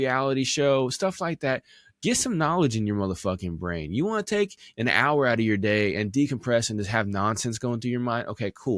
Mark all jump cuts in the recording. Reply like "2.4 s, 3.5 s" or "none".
none